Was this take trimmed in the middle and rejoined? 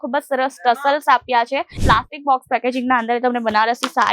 yes; 1 cut; at 1.8 s

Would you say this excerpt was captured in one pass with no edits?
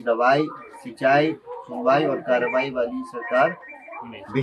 yes; 0 cuts

